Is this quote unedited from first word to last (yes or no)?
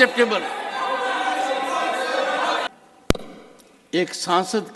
no